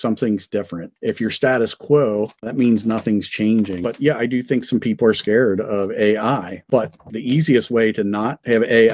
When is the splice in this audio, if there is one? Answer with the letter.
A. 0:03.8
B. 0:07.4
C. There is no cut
A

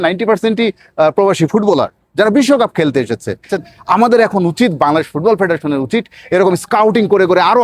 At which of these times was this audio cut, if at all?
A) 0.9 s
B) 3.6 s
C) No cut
B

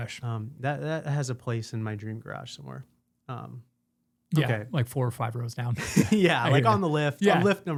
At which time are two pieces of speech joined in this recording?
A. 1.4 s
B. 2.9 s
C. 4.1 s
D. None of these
D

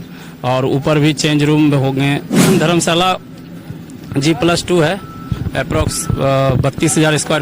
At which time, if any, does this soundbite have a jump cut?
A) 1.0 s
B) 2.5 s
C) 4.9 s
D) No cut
B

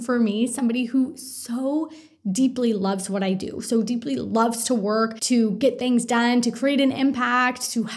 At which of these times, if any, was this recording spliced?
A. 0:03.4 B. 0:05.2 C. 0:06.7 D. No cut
B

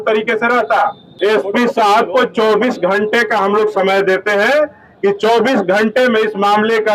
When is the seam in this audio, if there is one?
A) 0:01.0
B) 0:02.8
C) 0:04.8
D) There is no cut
A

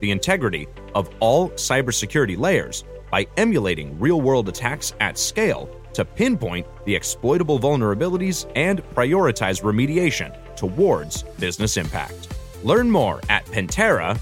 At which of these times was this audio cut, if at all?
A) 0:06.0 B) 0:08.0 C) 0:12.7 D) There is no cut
D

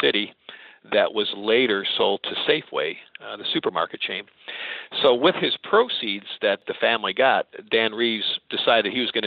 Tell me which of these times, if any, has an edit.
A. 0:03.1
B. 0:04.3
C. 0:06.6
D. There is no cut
C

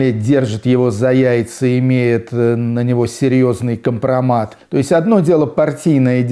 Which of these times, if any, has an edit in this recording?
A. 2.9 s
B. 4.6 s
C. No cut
B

